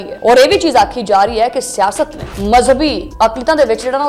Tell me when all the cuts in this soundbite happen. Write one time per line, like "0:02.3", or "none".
0:02.3
0:03.0